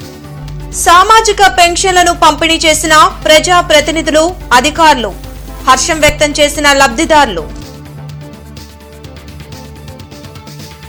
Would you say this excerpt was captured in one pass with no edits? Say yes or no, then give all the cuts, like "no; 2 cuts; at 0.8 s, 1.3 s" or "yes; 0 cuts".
yes; 0 cuts